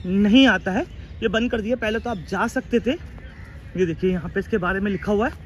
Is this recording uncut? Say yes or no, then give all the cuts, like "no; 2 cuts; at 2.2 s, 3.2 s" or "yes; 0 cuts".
yes; 0 cuts